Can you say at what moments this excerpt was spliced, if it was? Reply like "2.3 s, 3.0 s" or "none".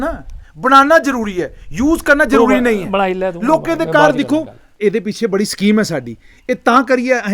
4.7 s